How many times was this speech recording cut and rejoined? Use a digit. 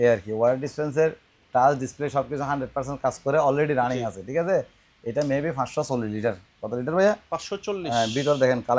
0